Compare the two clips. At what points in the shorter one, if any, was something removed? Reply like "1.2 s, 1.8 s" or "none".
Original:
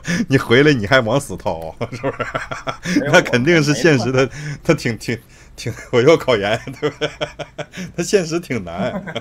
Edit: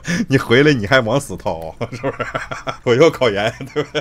2.7 s